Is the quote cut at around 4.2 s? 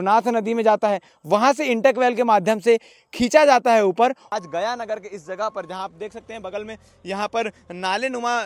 yes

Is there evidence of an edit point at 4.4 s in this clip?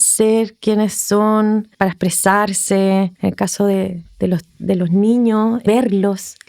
no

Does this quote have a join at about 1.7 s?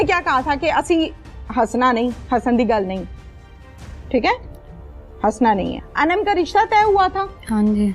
no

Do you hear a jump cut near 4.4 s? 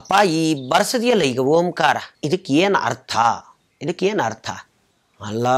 no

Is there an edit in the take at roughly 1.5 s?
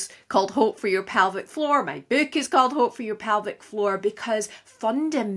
no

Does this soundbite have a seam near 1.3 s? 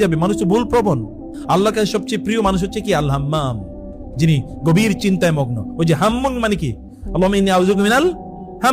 yes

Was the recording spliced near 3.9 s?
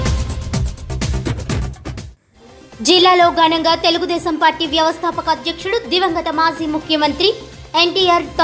no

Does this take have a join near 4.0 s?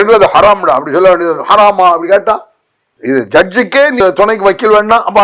yes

